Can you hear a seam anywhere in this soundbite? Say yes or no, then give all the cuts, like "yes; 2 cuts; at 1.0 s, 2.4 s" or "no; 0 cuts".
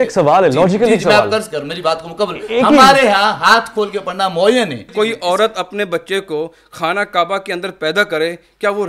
yes; 1 cut; at 4.8 s